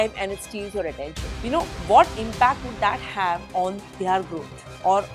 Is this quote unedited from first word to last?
no; 1 cut; at 1.3 s

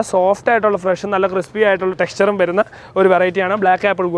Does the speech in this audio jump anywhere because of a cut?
yes; 1 cut; at 2.0 s

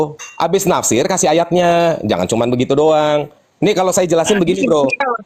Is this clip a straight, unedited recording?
yes; 0 cuts

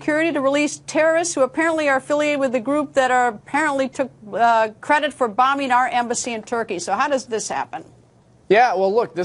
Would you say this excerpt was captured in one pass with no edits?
yes; 0 cuts

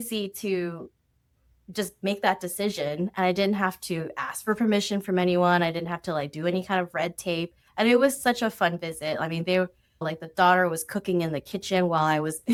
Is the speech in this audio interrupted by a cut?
no; 0 cuts

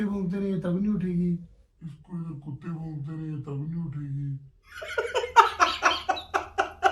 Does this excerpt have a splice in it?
no; 0 cuts

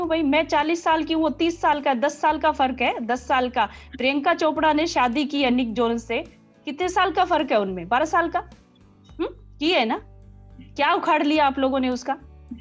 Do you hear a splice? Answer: no; 0 cuts

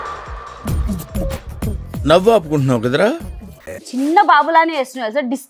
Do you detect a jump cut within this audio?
yes; 1 cut; at 3.8 s

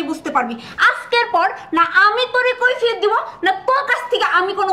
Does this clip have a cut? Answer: no; 0 cuts

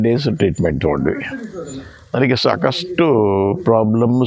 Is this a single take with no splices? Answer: yes; 0 cuts

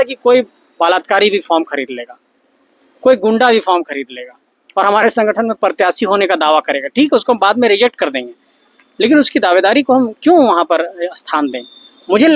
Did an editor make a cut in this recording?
no; 0 cuts

